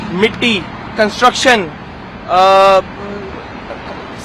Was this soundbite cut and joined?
no; 0 cuts

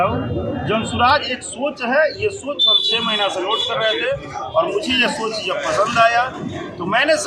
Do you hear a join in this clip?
no; 0 cuts

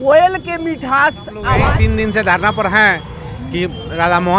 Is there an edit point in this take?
yes; 1 cut; at 1.5 s

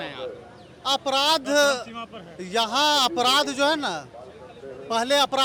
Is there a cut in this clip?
no; 0 cuts

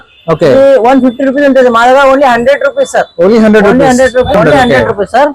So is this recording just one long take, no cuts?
no; 1 cut; at 4.3 s

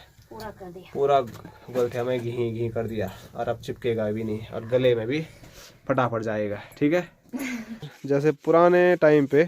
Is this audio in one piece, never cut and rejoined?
no; 1 cut; at 7.9 s

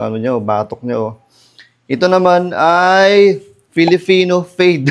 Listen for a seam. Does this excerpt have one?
no; 0 cuts

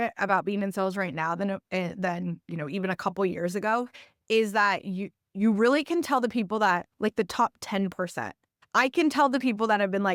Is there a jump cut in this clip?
no; 0 cuts

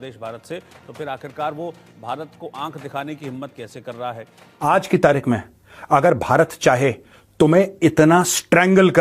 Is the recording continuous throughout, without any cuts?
no; 1 cut; at 4.6 s

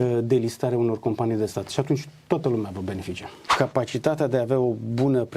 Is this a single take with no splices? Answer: no; 1 cut; at 3.5 s

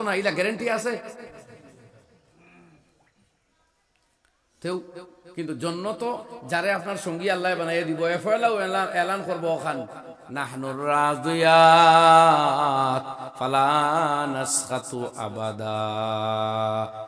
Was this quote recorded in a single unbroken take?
yes; 0 cuts

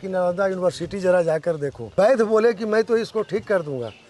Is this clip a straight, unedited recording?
no; 1 cut; at 1.8 s

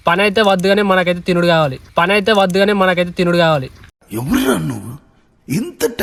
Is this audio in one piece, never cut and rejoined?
yes; 0 cuts

